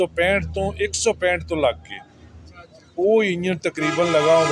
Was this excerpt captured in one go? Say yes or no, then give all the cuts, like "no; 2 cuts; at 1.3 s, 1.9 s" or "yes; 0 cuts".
yes; 0 cuts